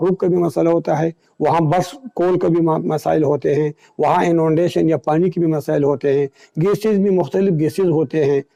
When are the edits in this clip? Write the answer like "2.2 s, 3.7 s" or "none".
none

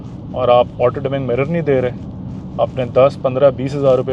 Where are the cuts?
none

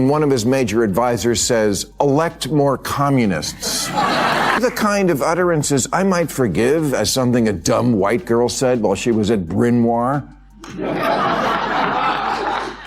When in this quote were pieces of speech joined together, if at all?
4.6 s

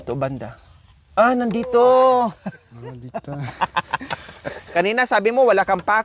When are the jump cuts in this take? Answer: 4.6 s

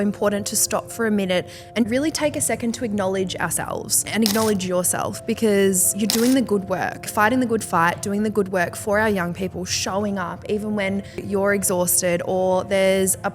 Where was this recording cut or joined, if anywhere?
1.9 s, 4.1 s, 5.9 s, 7.1 s, 11.2 s

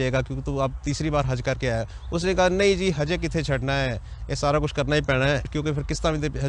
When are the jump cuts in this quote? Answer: 5.5 s

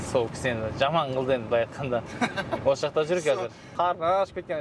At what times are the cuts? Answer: 3.7 s

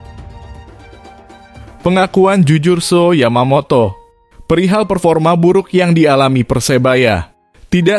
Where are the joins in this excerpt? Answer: 1.8 s

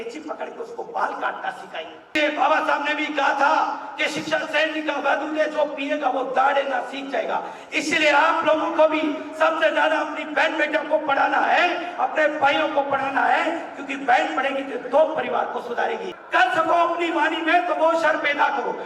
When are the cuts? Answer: 2.1 s, 16.1 s

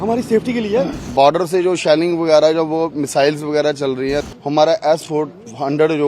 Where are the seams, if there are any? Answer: 1.1 s, 4.2 s

